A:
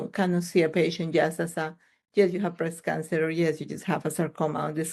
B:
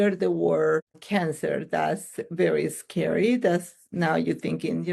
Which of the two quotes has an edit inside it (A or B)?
B